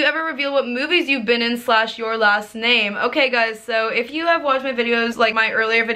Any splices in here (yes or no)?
no